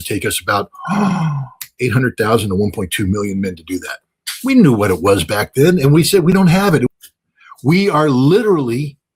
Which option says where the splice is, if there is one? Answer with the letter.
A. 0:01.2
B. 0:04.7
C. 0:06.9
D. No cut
C